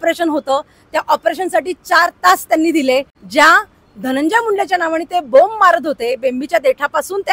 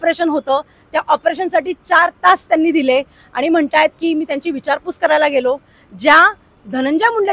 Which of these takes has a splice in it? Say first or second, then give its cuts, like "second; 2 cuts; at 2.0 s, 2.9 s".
first; 1 cut; at 3.2 s